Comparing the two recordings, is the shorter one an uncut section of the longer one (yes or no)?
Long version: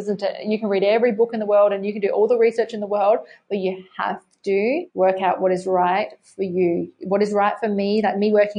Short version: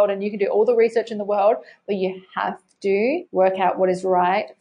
yes